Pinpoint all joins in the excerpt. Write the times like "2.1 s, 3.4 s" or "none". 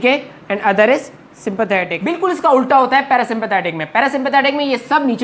2.0 s